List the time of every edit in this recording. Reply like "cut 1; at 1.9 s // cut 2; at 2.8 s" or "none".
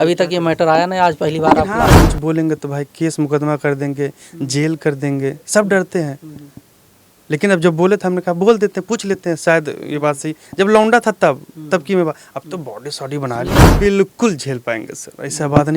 cut 1; at 1.9 s // cut 2; at 13.6 s